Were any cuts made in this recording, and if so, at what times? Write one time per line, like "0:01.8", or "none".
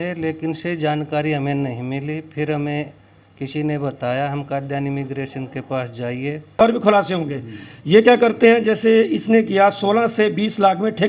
0:06.6